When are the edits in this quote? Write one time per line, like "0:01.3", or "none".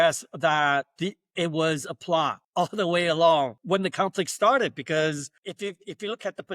0:02.4
0:03.6
0:05.3